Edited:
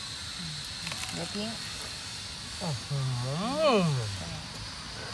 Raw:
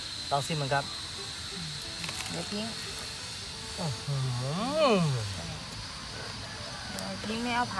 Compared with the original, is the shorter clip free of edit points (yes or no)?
yes